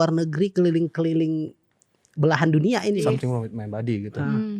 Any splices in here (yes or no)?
yes